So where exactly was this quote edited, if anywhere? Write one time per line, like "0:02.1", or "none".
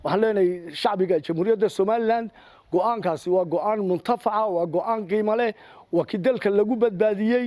none